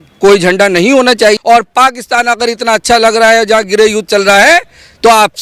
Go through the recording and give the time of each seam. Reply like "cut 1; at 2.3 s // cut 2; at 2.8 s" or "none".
cut 1; at 1.4 s